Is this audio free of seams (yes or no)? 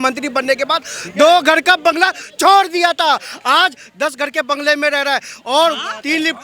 yes